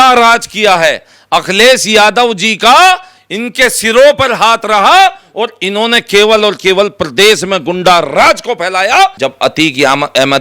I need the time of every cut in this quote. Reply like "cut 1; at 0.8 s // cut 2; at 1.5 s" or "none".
cut 1; at 9.2 s